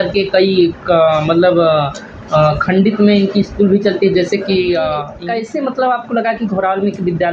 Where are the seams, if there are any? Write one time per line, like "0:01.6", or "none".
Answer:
0:05.1